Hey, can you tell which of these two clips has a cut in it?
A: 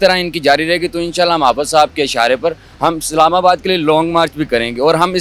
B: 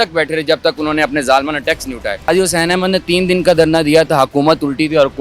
B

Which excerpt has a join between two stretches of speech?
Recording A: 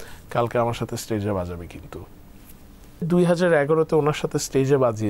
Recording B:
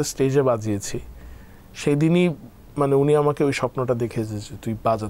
A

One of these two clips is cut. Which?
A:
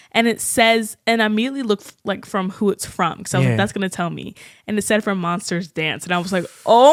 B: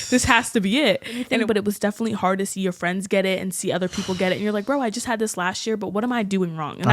B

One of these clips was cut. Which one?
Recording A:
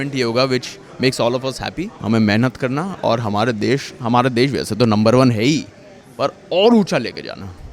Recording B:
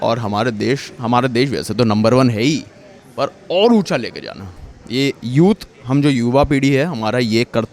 A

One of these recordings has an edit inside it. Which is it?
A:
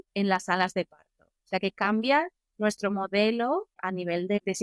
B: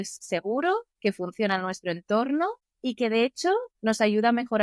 B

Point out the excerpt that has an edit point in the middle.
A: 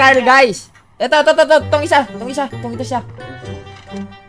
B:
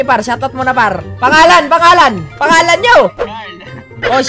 B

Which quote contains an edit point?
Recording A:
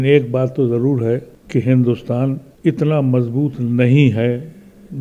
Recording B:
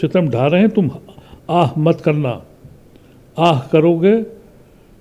A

